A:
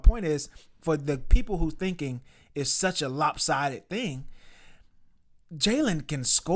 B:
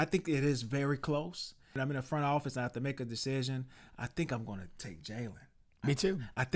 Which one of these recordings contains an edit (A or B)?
B